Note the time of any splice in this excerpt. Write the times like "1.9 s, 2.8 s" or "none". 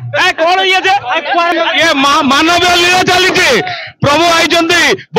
1.5 s